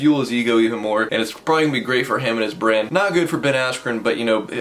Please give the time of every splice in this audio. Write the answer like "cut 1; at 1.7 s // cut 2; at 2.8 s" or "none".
cut 1; at 1.1 s // cut 2; at 2.9 s

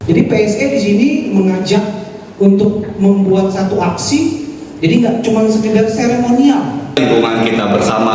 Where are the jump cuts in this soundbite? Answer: cut 1; at 6.9 s

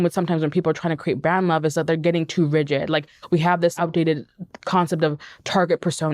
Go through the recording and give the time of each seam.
cut 1; at 3.7 s

